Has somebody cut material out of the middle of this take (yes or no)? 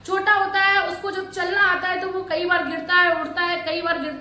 no